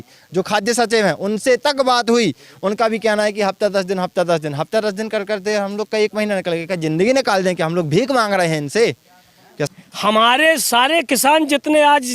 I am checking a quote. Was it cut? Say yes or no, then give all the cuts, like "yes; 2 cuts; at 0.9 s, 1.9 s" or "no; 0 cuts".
yes; 1 cut; at 9.7 s